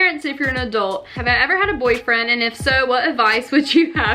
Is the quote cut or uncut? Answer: cut